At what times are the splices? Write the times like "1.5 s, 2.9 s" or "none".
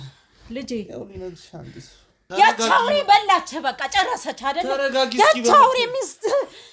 2.2 s